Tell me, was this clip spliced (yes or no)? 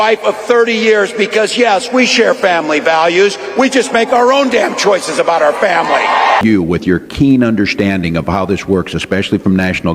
yes